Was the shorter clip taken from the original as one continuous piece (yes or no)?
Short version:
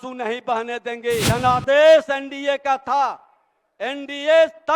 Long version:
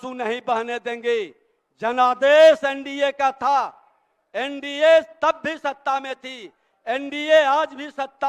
no